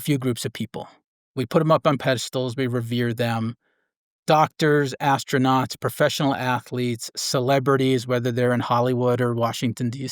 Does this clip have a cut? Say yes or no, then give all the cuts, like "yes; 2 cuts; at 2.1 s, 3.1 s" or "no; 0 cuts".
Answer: yes; 1 cut; at 1.2 s